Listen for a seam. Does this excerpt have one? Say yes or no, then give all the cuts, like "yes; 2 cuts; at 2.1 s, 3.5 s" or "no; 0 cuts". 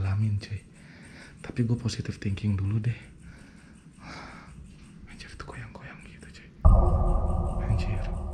yes; 1 cut; at 6.6 s